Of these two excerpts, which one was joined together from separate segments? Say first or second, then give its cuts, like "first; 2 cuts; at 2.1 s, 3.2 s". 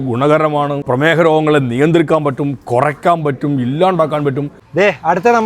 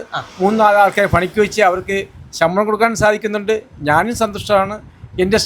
first; 2 cuts; at 0.8 s, 4.5 s